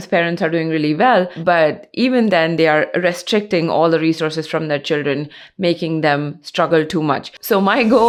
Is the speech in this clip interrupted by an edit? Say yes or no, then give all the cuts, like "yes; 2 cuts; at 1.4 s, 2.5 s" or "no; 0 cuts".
no; 0 cuts